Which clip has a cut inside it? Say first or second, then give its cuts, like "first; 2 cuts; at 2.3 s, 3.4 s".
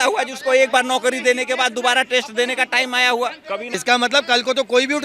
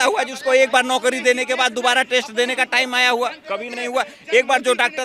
first; 1 cut; at 3.8 s